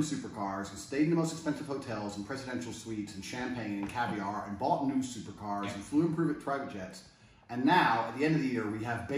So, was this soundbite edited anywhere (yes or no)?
yes